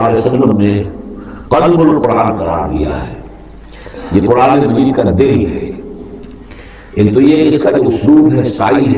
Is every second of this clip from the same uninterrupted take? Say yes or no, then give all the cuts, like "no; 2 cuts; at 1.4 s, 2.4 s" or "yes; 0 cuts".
yes; 0 cuts